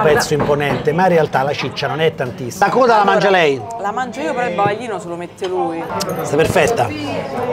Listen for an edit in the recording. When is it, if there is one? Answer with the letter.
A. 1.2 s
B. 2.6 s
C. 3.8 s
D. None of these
B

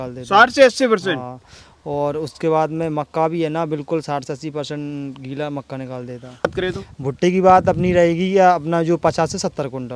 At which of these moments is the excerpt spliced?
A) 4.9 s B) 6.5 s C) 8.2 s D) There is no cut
B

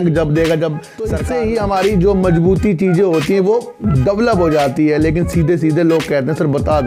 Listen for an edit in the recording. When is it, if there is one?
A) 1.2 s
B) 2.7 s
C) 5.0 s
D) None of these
A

